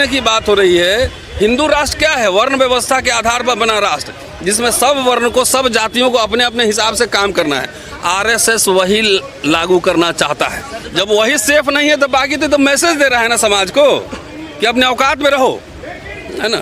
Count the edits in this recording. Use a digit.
1